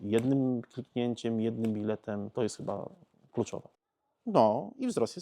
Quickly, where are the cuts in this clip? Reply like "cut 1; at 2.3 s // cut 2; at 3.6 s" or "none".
cut 1; at 3.8 s